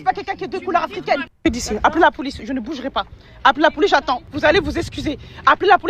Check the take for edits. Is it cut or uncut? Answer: cut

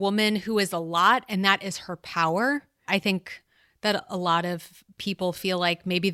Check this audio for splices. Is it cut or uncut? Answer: cut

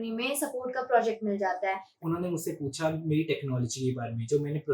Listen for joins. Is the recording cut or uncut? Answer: cut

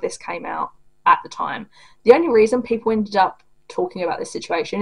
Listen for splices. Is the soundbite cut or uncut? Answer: uncut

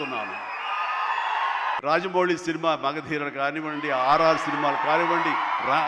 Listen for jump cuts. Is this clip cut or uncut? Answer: cut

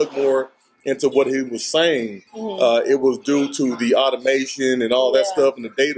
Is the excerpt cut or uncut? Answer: uncut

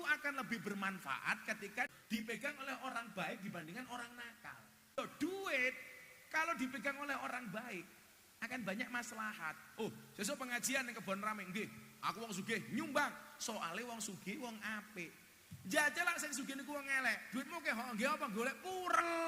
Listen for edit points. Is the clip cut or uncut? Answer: cut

